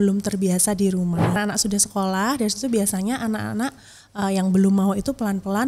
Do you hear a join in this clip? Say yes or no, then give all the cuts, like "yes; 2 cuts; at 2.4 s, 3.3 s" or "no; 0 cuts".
yes; 1 cut; at 1.4 s